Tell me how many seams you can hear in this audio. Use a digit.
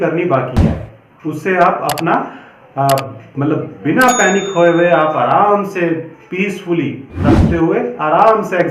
1